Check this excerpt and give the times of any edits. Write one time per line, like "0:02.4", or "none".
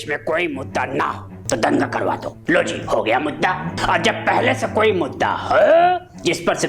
0:01.3
0:02.3
0:03.7